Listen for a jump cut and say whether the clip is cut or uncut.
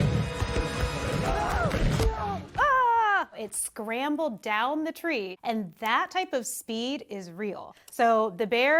uncut